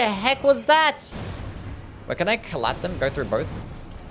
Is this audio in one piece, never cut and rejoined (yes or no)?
no